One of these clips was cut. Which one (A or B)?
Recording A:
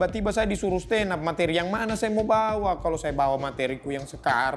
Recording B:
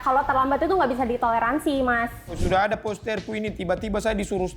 B